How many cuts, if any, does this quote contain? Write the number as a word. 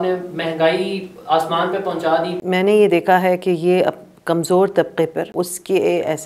two